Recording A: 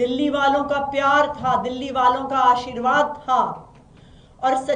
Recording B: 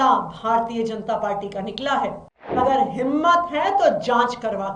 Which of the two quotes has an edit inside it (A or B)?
B